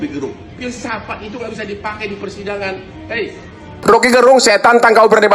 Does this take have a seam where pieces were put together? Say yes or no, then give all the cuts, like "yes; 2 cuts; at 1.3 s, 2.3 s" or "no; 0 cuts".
yes; 1 cut; at 3.8 s